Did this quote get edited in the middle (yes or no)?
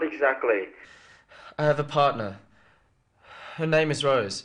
no